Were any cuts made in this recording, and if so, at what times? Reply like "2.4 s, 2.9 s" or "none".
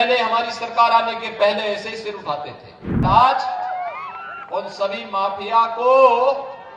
3.0 s